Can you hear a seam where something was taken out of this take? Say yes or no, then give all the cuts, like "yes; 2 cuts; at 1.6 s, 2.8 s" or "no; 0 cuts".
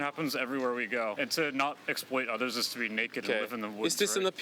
yes; 1 cut; at 1.2 s